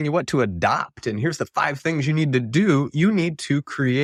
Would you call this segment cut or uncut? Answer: uncut